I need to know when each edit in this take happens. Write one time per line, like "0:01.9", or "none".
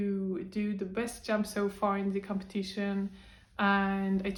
none

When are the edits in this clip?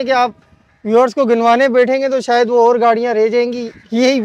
none

